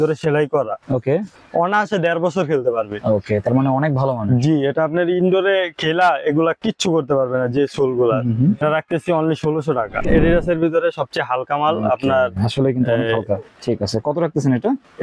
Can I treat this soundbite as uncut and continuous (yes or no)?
no